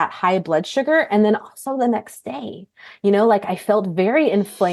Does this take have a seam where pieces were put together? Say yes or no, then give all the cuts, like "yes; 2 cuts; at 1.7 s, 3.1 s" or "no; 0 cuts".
no; 0 cuts